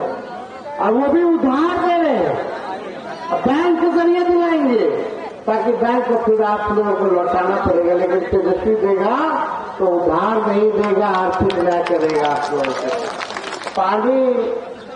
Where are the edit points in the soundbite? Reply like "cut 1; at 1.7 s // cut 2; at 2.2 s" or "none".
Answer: cut 1; at 13.6 s